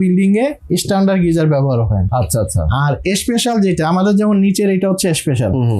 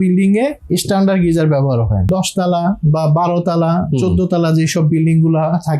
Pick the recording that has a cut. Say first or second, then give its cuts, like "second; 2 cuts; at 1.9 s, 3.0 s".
second; 1 cut; at 2.1 s